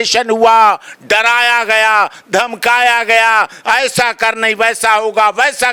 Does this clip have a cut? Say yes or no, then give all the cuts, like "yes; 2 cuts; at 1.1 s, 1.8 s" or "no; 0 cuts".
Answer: no; 0 cuts